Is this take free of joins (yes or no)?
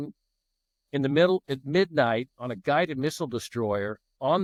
yes